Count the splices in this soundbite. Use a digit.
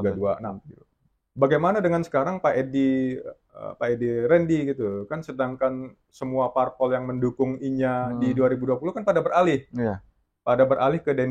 0